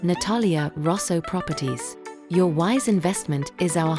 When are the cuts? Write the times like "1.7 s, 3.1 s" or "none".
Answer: none